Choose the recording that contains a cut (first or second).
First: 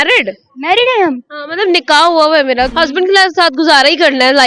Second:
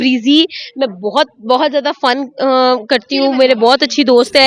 first